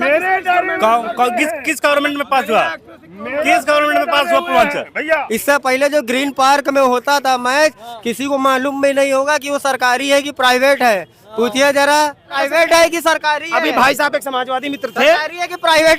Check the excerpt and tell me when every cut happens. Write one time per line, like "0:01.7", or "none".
0:05.2
0:12.3